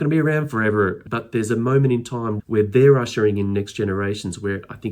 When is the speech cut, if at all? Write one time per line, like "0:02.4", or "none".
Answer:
0:01.0
0:02.3